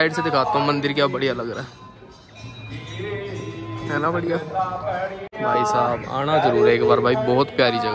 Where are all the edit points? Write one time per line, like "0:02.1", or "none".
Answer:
none